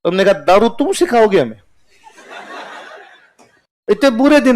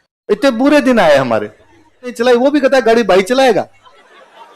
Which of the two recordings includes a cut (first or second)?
second